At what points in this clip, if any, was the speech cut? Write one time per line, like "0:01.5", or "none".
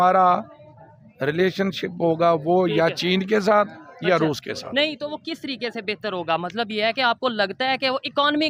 none